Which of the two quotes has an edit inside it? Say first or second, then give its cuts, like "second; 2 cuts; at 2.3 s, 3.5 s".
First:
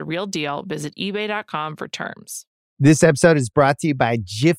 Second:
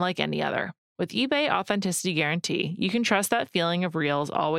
first; 1 cut; at 2.5 s